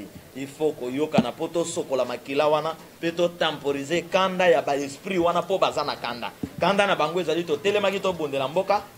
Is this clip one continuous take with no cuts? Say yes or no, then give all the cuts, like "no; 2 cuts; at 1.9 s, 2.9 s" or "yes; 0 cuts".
yes; 0 cuts